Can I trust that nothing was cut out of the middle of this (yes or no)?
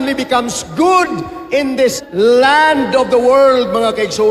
no